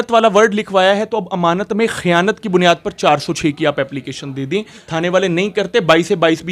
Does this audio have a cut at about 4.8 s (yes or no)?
yes